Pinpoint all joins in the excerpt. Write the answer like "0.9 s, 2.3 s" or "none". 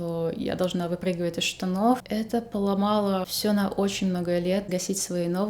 2.0 s, 3.3 s, 4.7 s